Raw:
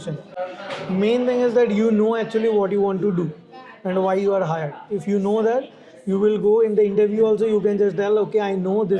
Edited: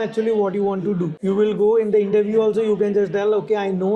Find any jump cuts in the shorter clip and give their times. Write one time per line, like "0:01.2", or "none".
0:01.1

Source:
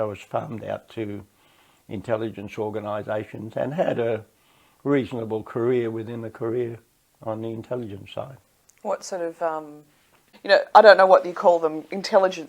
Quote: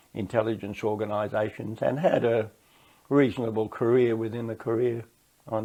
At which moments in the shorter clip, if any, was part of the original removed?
none

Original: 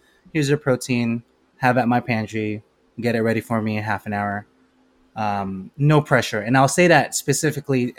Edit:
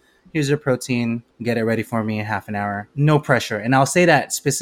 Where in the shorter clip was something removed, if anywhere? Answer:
0:01.3
0:02.9

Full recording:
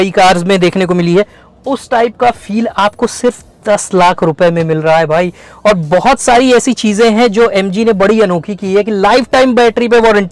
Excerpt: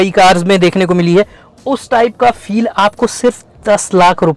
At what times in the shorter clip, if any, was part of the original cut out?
none

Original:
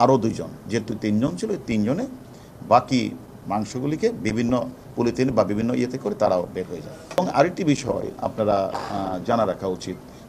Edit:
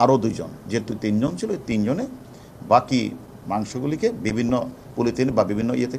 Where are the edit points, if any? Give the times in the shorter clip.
none

